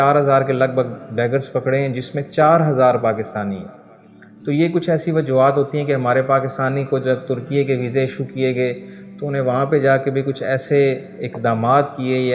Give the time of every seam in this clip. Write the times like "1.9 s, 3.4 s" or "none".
none